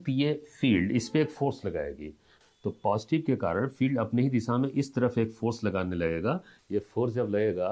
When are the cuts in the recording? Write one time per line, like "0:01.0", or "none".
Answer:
0:02.3
0:06.5